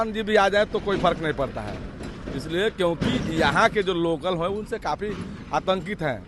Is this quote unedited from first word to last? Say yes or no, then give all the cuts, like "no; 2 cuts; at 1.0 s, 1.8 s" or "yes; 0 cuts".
yes; 0 cuts